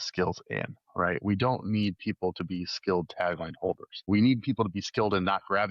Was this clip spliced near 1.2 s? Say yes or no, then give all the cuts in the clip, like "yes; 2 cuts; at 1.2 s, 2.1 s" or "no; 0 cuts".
no; 1 cut; at 4.1 s